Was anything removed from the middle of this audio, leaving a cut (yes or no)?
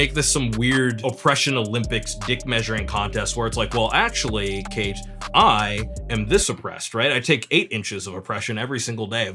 yes